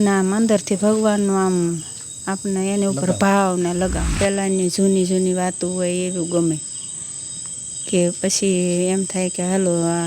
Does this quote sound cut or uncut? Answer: cut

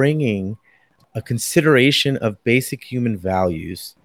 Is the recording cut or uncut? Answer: cut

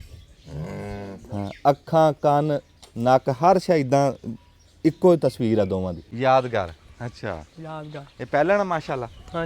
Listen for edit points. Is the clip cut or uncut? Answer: cut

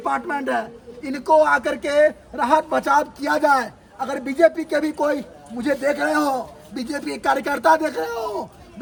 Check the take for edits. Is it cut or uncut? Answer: uncut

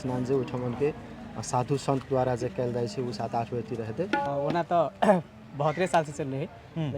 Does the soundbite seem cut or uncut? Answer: cut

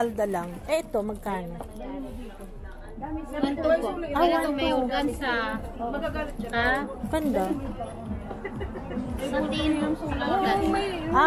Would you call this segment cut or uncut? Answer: uncut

